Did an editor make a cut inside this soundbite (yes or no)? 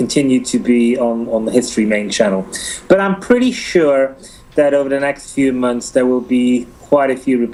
no